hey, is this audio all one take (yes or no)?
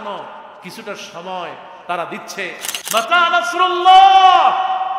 no